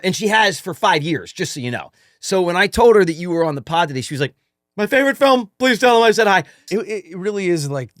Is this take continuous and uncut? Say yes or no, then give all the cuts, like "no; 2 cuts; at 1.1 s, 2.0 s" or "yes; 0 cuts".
no; 1 cut; at 6.6 s